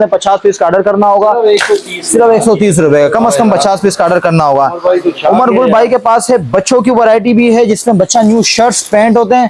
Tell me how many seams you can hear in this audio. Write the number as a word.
zero